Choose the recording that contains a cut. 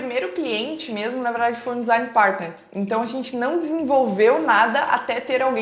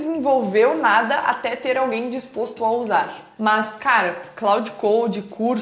second; 1 cut; at 3.2 s

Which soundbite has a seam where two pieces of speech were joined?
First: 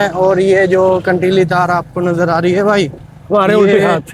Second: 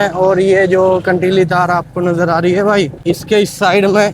second; 1 cut; at 3.0 s

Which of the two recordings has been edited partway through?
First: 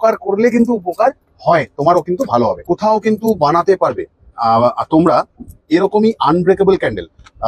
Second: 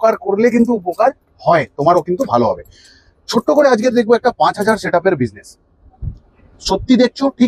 first; 1 cut; at 2.6 s

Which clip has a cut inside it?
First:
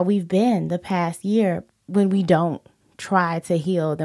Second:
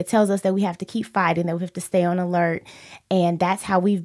first; 1 cut; at 1.7 s

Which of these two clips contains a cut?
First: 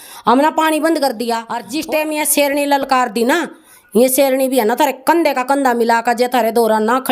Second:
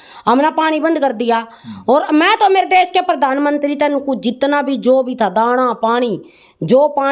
first; 1 cut; at 1.7 s

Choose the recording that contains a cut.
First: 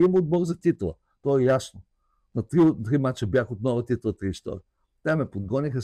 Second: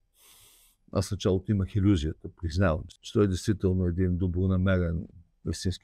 second; 1 cut; at 2.9 s

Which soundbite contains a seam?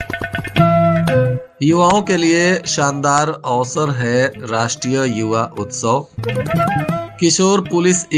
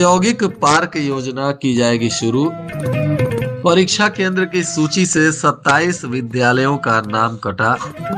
first; 1 cut; at 1.4 s

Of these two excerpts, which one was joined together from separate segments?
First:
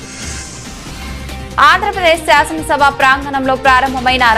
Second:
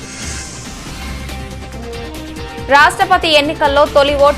first; 1 cut; at 0.9 s

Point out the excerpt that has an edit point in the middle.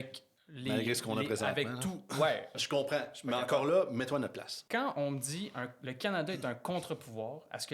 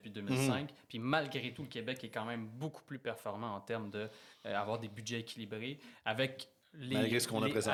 first; 2 cuts; at 2.5 s, 4.5 s

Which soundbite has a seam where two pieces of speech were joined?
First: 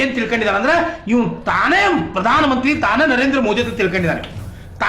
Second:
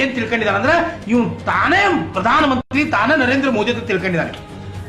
first; 1 cut; at 2.6 s

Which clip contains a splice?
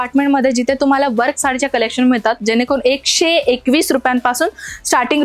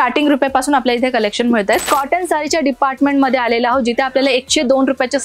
second; 1 cut; at 1.8 s

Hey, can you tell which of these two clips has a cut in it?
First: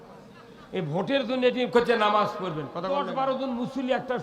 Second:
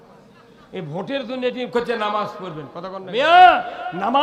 first; 1 cut; at 3.1 s

